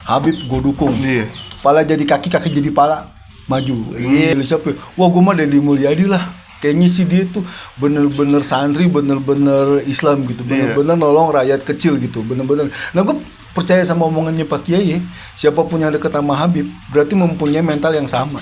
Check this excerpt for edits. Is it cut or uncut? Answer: cut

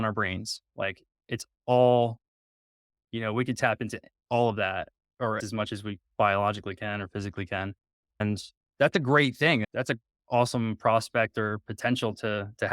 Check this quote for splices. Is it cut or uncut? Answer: cut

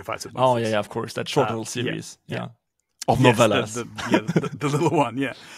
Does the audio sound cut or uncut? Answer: uncut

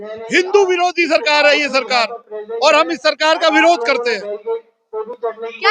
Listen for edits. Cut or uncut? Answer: uncut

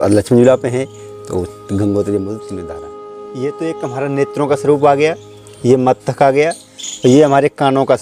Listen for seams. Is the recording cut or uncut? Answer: cut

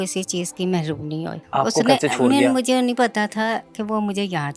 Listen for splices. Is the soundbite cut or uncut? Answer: cut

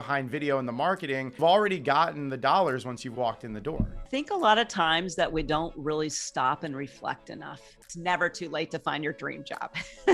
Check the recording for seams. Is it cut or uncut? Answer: cut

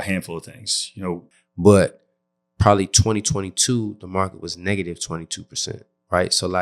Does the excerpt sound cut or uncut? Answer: cut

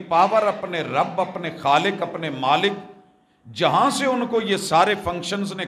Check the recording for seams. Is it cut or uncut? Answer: uncut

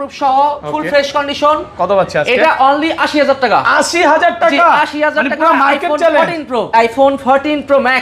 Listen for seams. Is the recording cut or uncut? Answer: cut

